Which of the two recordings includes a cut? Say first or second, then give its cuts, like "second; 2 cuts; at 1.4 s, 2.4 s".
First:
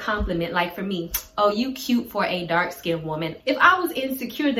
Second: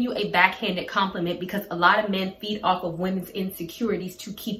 first; 1 cut; at 3.3 s